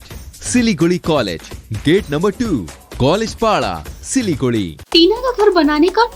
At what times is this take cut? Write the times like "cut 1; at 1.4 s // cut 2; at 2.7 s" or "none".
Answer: cut 1; at 4.8 s